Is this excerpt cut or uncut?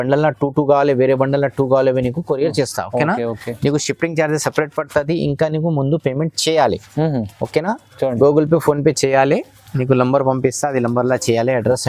uncut